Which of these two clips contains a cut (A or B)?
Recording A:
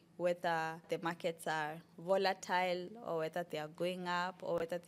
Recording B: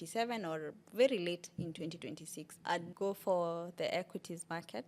B